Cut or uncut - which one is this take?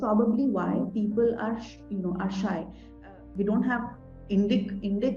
cut